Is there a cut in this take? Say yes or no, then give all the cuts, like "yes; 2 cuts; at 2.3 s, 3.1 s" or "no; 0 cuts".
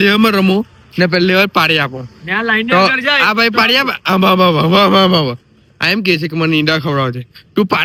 no; 0 cuts